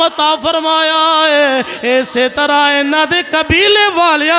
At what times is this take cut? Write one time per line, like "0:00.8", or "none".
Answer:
none